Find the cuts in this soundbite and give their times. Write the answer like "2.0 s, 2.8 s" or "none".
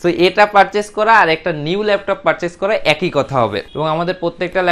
3.6 s